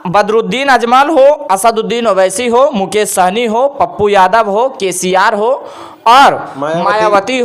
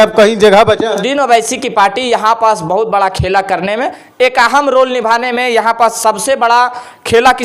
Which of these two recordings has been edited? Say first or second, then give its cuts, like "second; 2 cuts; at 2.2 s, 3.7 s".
second; 1 cut; at 1.0 s